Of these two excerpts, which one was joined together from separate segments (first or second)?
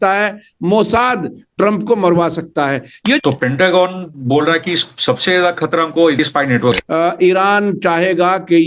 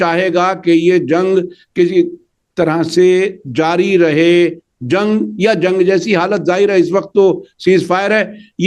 first